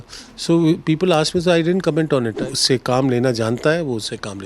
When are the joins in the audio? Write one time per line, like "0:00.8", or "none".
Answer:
0:02.4